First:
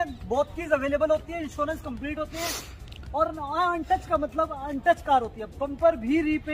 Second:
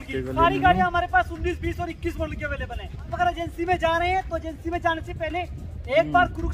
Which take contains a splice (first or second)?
second